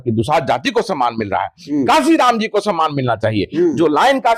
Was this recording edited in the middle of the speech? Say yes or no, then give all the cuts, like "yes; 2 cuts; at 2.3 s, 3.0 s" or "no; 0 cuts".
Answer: no; 0 cuts